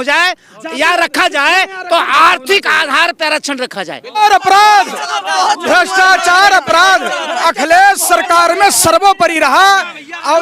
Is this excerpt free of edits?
no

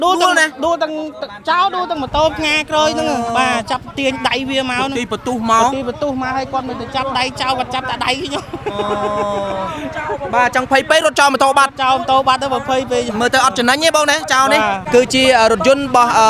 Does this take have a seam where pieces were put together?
yes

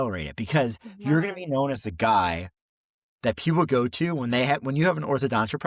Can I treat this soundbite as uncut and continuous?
yes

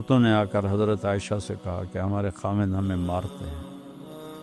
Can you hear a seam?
yes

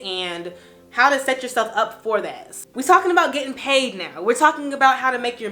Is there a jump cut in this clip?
yes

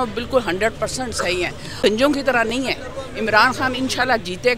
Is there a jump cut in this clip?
yes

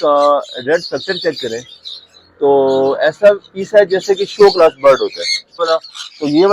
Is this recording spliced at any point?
yes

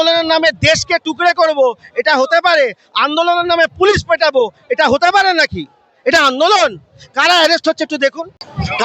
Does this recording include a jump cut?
no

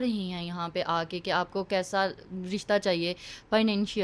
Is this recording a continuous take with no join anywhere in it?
yes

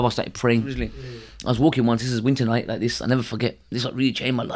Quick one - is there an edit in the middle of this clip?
yes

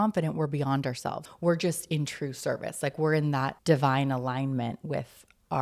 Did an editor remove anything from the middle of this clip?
yes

